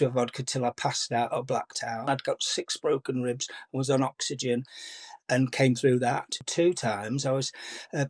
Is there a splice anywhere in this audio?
yes; 2 cuts; at 2.1 s, 6.4 s

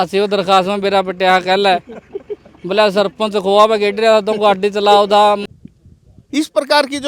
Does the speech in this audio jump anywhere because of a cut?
yes; 1 cut; at 5.4 s

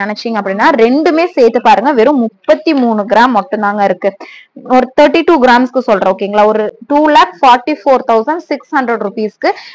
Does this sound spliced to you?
no; 0 cuts

